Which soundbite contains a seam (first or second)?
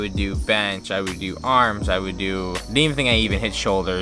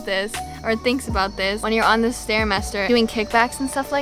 second